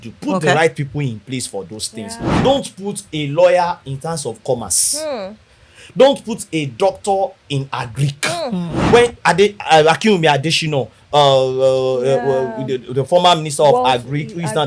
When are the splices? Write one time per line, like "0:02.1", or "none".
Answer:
0:02.4
0:08.8